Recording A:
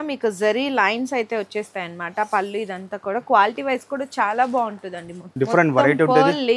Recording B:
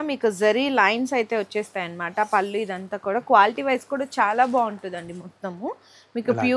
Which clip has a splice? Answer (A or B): A